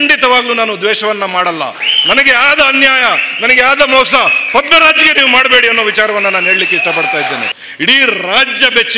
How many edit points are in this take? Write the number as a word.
two